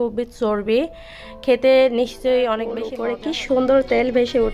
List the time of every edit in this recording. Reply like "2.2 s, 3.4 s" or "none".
2.9 s